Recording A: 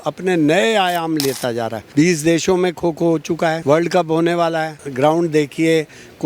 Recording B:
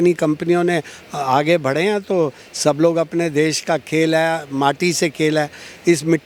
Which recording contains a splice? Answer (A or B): A